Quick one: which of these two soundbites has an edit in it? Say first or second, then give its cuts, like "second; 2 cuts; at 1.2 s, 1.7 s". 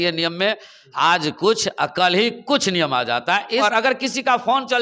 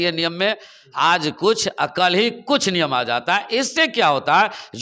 first; 1 cut; at 3.6 s